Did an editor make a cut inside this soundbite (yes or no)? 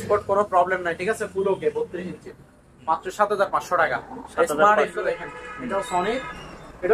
no